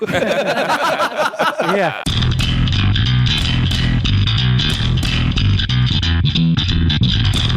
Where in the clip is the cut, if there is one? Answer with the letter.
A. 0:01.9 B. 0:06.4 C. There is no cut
A